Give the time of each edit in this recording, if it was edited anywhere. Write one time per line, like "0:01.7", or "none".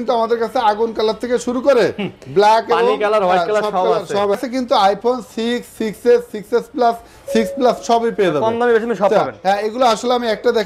0:04.4